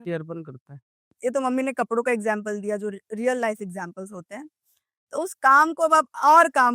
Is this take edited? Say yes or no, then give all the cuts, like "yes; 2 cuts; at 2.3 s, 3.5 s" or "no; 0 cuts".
yes; 1 cut; at 1.0 s